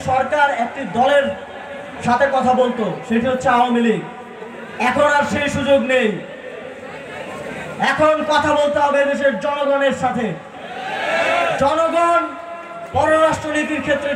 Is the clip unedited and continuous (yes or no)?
yes